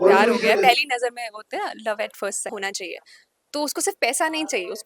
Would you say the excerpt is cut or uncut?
cut